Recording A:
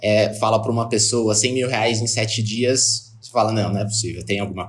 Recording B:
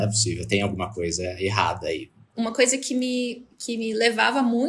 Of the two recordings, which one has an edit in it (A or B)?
B